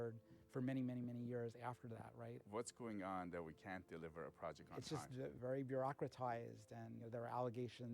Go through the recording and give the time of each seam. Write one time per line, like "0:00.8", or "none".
0:02.4
0:05.4
0:07.1